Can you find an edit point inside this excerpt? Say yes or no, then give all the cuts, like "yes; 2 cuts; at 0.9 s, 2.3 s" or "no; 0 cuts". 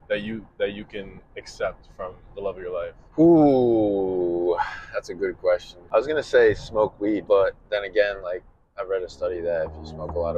yes; 3 cuts; at 3.0 s, 5.8 s, 7.2 s